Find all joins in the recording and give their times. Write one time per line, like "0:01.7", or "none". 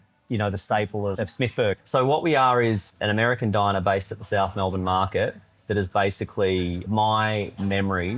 0:01.5
0:02.9
0:06.9